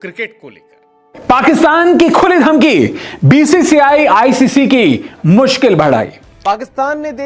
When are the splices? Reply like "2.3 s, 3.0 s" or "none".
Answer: 1.2 s, 6.5 s